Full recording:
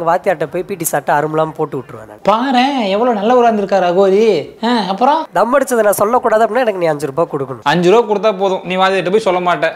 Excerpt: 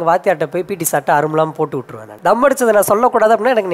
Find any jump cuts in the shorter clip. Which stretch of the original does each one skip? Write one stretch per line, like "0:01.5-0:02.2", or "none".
0:02.2-0:05.3